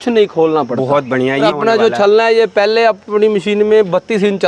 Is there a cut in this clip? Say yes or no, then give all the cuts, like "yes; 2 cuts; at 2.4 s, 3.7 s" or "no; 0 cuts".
yes; 1 cut; at 1.4 s